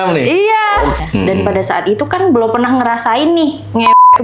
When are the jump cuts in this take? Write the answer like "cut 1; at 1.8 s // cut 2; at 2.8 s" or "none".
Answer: cut 1; at 1.0 s